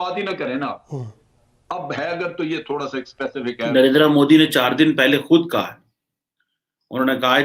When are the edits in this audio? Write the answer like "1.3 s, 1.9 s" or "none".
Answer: 3.7 s